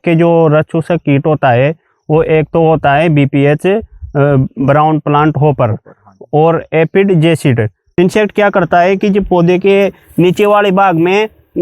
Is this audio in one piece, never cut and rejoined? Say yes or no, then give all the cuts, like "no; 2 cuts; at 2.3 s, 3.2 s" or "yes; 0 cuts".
no; 1 cut; at 7.8 s